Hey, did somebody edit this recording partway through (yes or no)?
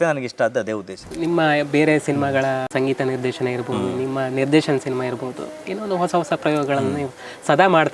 yes